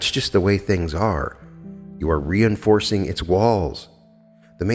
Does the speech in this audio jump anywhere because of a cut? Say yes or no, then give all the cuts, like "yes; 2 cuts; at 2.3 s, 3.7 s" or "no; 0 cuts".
no; 0 cuts